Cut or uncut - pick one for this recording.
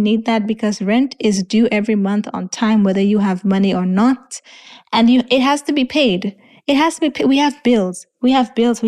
uncut